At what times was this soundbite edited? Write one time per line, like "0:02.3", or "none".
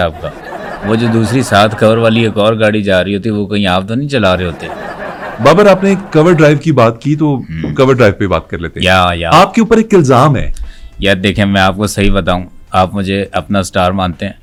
none